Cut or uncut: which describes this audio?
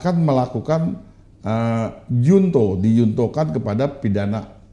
uncut